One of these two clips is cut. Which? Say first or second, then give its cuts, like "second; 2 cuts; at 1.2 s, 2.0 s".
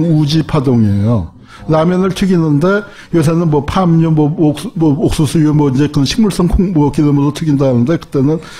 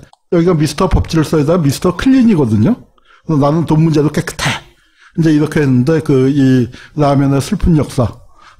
first; 1 cut; at 4.6 s